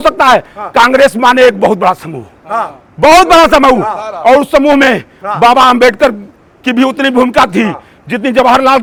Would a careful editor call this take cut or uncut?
uncut